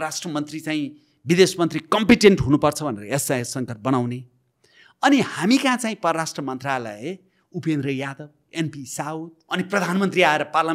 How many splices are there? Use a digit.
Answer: 1